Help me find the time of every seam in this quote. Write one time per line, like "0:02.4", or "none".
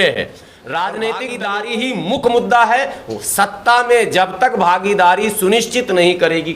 0:01.6